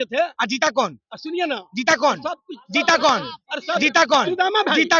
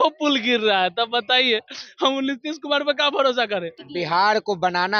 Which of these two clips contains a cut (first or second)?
second